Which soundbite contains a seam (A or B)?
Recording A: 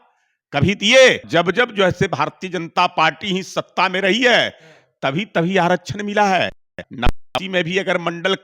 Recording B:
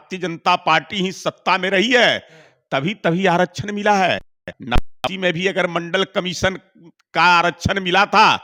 A